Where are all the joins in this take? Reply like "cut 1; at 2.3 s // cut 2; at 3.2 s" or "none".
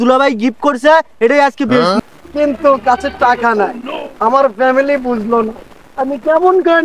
cut 1; at 2.0 s